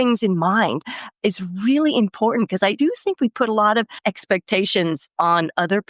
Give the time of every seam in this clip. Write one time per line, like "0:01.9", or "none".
0:02.7
0:03.9